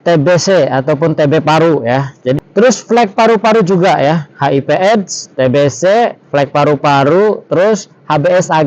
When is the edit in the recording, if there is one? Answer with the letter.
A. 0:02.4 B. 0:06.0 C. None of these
A